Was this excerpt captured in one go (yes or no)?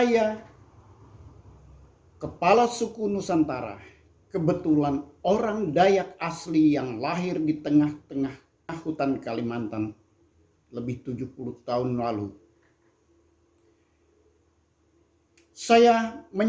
no